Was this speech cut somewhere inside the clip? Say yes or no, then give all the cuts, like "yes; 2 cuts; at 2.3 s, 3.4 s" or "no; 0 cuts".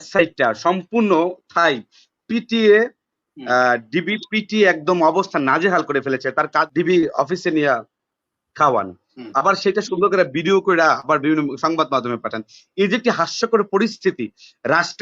yes; 1 cut; at 6.7 s